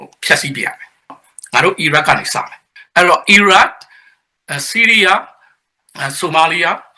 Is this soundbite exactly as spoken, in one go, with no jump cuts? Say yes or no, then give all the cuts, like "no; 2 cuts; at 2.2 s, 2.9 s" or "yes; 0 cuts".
no; 2 cuts; at 1.2 s, 2.7 s